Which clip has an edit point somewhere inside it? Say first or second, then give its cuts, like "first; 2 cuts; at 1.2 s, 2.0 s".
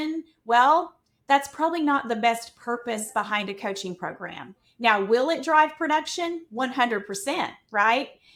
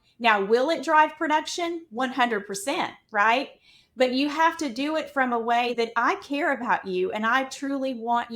second; 1 cut; at 5.7 s